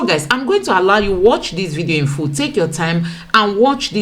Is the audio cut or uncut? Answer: uncut